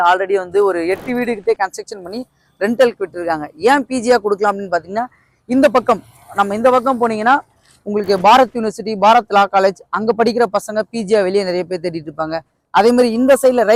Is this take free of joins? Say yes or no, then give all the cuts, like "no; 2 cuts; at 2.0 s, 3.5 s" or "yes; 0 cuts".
yes; 0 cuts